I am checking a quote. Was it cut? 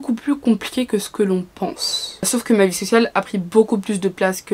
yes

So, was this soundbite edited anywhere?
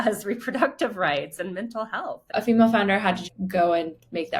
yes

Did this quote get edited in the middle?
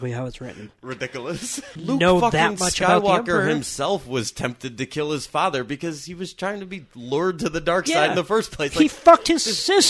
yes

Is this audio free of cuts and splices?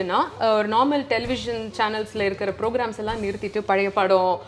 yes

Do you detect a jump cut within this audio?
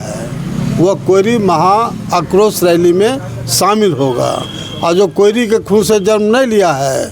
no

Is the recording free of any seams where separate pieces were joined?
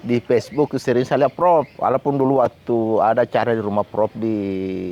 no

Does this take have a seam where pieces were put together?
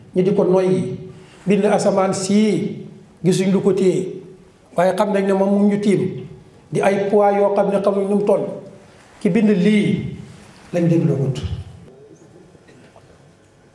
yes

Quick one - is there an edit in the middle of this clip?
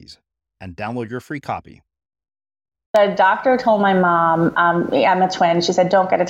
yes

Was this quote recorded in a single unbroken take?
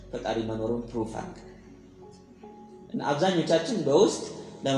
yes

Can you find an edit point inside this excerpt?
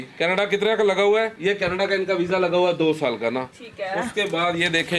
no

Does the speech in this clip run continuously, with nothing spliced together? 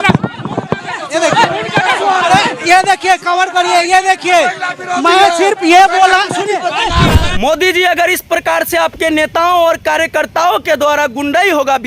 no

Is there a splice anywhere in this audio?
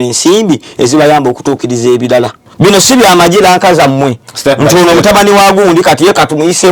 yes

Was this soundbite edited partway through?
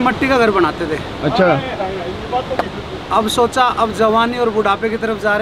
no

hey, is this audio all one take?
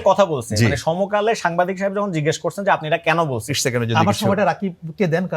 no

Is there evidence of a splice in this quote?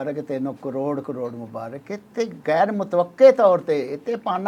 no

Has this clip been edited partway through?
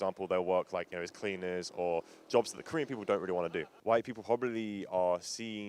no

